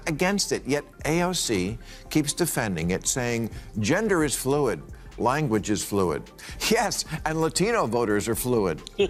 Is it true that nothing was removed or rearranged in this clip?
yes; 0 cuts

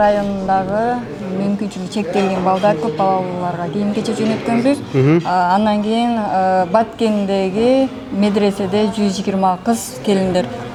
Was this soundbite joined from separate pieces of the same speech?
no; 0 cuts

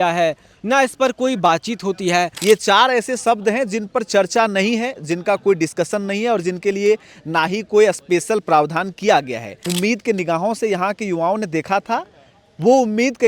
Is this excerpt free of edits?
no; 2 cuts; at 2.3 s, 9.7 s

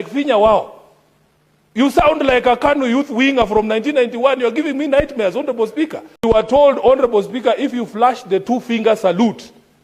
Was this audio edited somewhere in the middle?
yes; 1 cut; at 6.2 s

